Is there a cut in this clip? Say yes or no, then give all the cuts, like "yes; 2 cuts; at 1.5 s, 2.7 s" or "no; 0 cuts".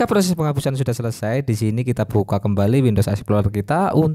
no; 0 cuts